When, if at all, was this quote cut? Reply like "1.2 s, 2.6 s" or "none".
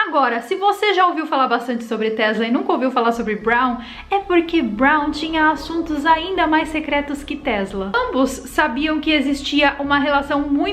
7.9 s